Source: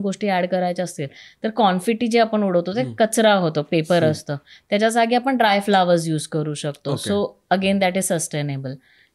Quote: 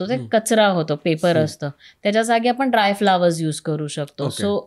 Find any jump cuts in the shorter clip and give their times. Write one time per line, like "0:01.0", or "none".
none

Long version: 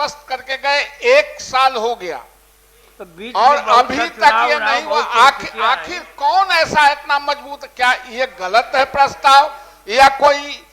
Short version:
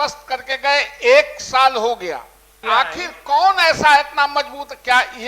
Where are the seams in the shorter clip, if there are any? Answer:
0:02.6

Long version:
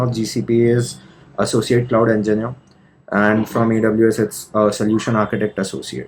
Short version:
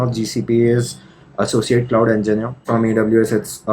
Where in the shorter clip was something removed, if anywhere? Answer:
0:02.6

